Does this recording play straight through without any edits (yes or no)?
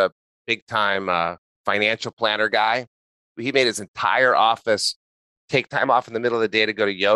no